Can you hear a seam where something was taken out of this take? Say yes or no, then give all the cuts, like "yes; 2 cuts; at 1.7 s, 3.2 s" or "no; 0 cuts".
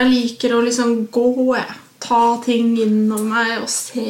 no; 0 cuts